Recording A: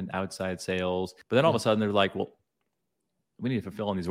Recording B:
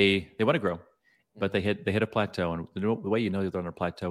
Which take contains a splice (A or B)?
A